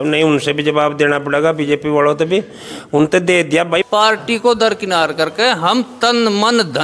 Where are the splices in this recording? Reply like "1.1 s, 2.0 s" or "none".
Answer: 3.8 s